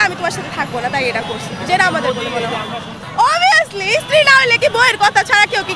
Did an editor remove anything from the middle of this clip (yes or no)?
yes